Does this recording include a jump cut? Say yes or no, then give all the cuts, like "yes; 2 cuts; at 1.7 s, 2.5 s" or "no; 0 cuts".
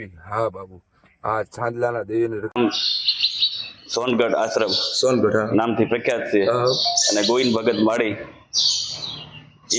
yes; 1 cut; at 2.6 s